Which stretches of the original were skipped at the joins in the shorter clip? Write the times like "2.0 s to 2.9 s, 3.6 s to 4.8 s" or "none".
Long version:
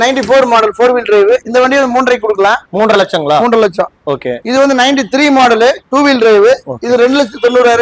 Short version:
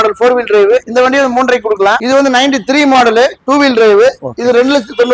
2.6 s to 4.5 s